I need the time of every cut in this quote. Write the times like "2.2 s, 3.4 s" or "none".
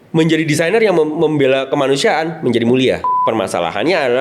3.1 s

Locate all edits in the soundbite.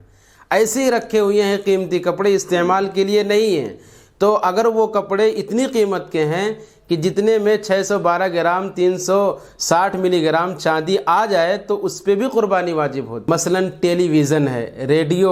13.2 s

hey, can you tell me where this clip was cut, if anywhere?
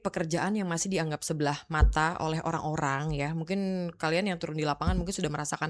none

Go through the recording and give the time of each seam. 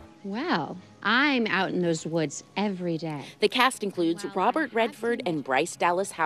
1.2 s

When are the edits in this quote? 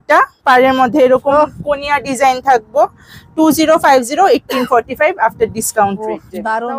none

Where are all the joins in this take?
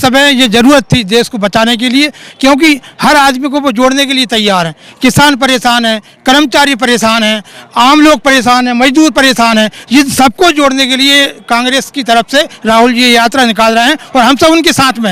none

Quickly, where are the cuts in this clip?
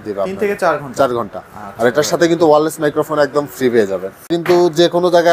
4.3 s

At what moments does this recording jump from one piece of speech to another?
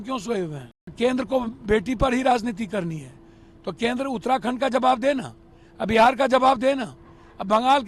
0.9 s

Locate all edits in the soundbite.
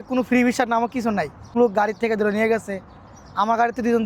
1.5 s

